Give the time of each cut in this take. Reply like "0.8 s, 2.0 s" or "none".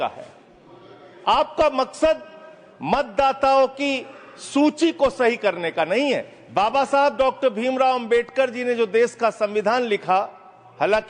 6.4 s